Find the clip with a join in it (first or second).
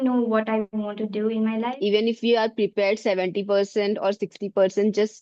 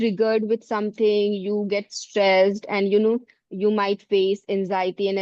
first